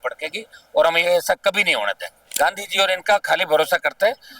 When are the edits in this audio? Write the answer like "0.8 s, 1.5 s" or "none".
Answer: 2.3 s